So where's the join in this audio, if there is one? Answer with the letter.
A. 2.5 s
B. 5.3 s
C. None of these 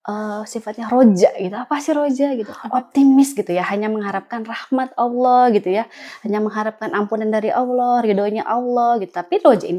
A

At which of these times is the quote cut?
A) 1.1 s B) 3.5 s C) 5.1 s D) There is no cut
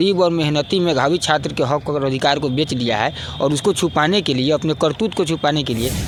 D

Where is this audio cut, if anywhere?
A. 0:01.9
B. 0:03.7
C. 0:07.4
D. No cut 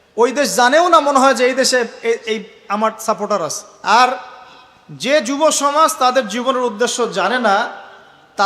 B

